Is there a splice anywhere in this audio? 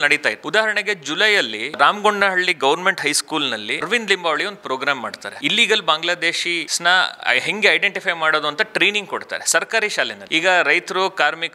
yes; 1 cut; at 10.3 s

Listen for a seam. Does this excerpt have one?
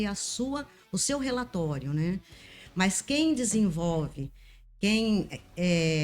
yes; 1 cut; at 2.4 s

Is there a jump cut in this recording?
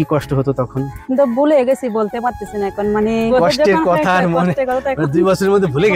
yes; 2 cuts; at 1.0 s, 3.3 s

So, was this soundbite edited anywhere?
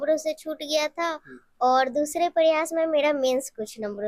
no; 0 cuts

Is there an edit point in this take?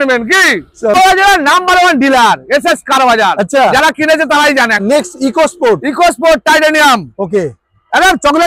yes; 2 cuts; at 1.0 s, 4.8 s

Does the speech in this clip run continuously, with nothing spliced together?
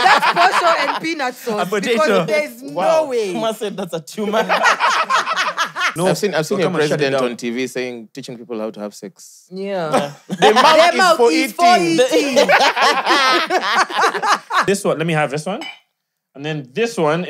no; 2 cuts; at 5.9 s, 14.6 s

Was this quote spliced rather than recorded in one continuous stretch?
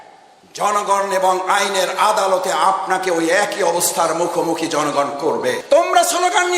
yes; 1 cut; at 5.6 s

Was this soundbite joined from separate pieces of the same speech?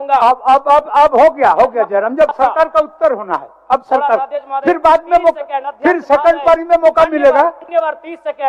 no; 0 cuts

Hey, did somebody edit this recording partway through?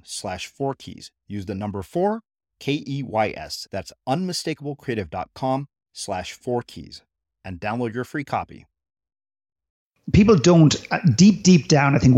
yes; 1 cut; at 10.1 s

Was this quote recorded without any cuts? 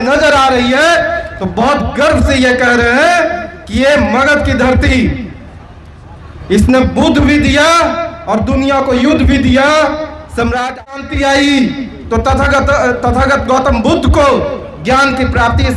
no; 1 cut; at 10.9 s

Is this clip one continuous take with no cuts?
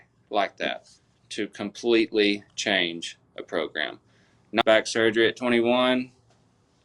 no; 1 cut; at 4.6 s

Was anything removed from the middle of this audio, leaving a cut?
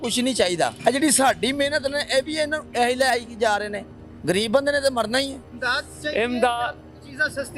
yes; 1 cut; at 5.5 s

